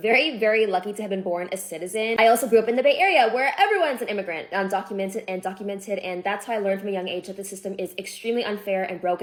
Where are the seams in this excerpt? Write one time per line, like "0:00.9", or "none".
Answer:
none